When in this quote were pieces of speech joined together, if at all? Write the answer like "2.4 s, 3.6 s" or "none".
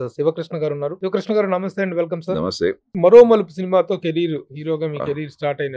1.0 s, 2.8 s